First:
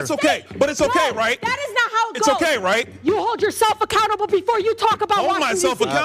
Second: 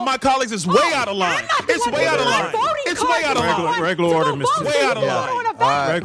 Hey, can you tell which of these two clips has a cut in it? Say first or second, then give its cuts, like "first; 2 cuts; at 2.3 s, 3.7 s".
first; 1 cut; at 3.4 s